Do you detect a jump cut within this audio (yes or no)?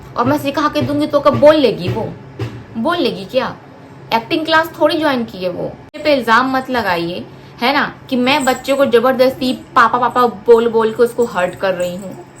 yes